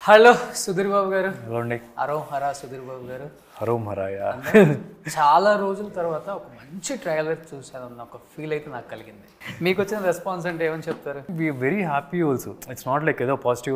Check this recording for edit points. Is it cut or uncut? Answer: cut